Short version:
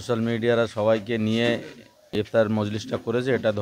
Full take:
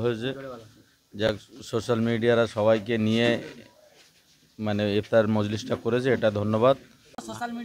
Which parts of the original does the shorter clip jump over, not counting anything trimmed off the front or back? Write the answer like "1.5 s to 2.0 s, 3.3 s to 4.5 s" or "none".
4.1 s to 5.1 s